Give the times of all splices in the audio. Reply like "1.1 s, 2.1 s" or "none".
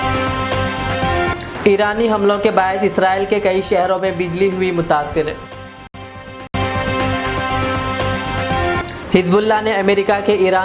1.4 s